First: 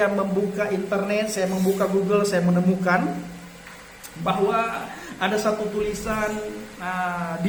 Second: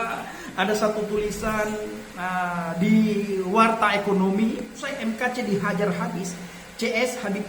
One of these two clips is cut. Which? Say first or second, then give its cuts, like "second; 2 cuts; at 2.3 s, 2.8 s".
second; 1 cut; at 4.8 s